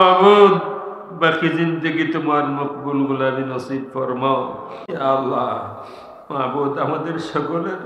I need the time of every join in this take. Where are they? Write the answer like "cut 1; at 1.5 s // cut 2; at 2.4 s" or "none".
cut 1; at 4.8 s